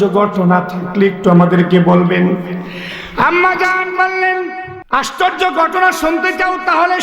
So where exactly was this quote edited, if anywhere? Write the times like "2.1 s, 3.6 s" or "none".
4.7 s